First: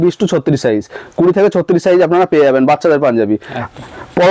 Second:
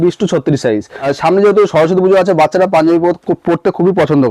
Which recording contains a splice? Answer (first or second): second